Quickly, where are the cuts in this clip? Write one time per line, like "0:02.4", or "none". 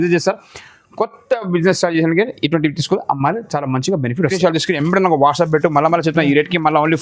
0:04.3